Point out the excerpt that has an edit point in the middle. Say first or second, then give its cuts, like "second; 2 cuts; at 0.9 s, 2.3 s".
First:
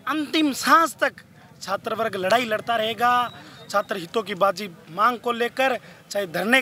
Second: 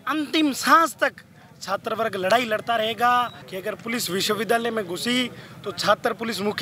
second; 1 cut; at 3.4 s